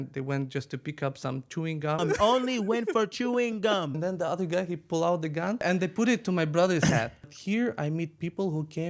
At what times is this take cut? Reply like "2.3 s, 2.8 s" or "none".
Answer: 2.0 s, 3.9 s, 5.6 s, 7.4 s